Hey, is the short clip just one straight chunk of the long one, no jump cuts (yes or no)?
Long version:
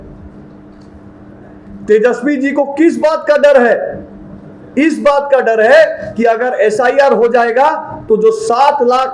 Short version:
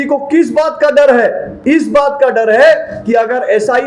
no